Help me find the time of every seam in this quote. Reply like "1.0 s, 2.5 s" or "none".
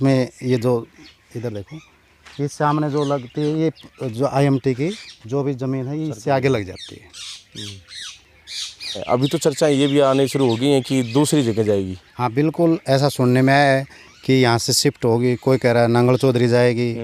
9.0 s